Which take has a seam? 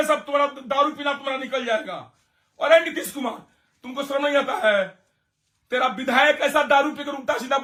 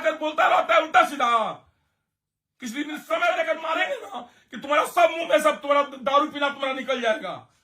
second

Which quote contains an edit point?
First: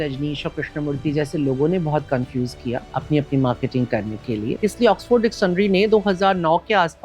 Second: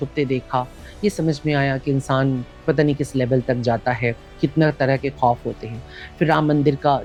first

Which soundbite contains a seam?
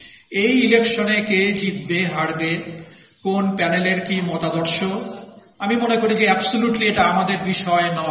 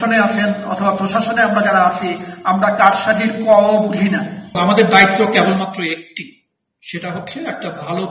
second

